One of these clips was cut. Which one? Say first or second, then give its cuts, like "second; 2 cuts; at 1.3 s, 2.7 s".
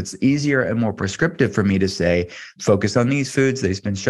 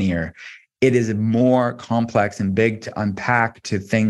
first; 2 cuts; at 1.1 s, 2.4 s